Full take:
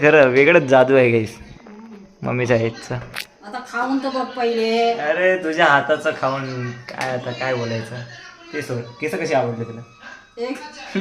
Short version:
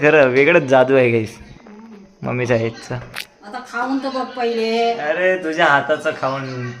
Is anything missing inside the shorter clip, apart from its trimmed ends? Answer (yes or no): no